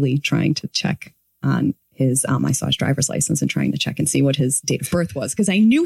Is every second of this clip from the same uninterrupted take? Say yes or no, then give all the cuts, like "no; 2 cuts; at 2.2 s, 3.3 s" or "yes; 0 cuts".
no; 1 cut; at 1.8 s